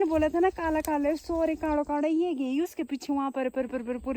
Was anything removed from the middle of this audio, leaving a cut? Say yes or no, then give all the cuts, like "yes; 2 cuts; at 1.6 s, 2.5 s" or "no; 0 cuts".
no; 0 cuts